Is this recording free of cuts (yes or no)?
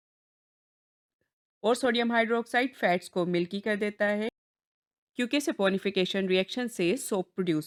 yes